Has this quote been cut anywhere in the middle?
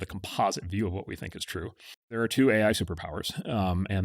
yes; 1 cut; at 2.2 s

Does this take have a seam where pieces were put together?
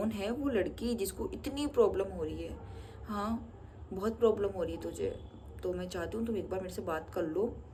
no; 0 cuts

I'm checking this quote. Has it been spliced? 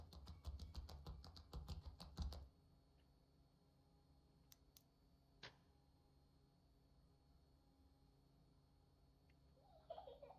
no; 0 cuts

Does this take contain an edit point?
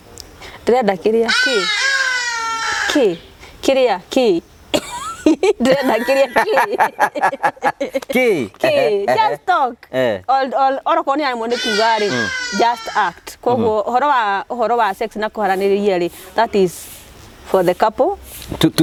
no; 0 cuts

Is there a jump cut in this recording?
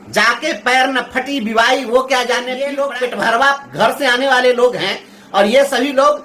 yes; 1 cut; at 2.5 s

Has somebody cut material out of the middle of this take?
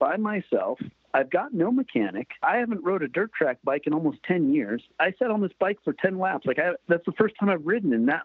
yes; 3 cuts; at 2.4 s, 4.9 s, 6.8 s

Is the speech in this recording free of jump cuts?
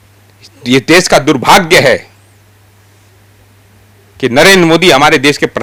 yes; 0 cuts

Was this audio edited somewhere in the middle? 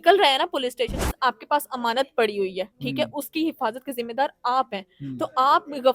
yes; 1 cut; at 1.1 s

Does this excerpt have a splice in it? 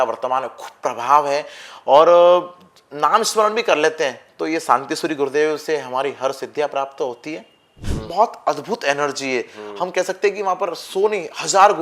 yes; 1 cut; at 7.9 s

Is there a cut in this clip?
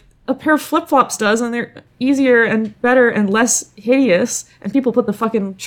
no; 0 cuts

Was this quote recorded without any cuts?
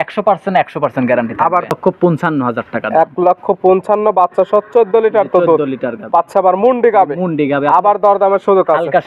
no; 1 cut; at 1.7 s

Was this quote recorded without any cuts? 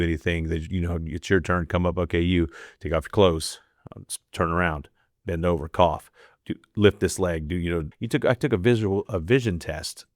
no; 1 cut; at 7.9 s

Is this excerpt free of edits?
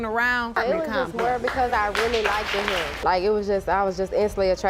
yes; 0 cuts

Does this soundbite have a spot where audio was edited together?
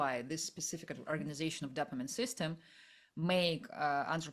no; 0 cuts

